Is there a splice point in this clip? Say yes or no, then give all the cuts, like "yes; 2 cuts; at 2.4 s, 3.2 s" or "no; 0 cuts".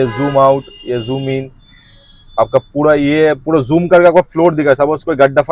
no; 0 cuts